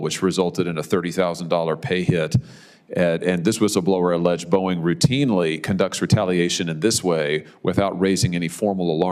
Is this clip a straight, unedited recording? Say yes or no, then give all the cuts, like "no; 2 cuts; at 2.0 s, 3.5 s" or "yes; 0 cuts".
yes; 0 cuts